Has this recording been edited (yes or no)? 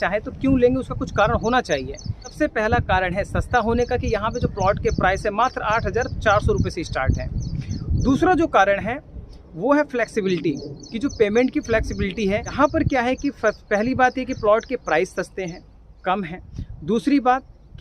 yes